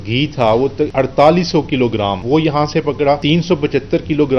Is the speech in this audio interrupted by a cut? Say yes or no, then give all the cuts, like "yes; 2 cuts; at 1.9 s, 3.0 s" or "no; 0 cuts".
yes; 3 cuts; at 0.8 s, 2.2 s, 3.2 s